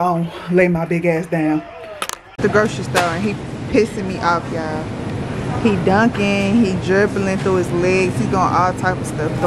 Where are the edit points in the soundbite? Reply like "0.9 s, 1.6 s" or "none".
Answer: 2.4 s